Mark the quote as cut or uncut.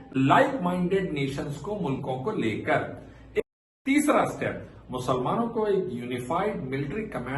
cut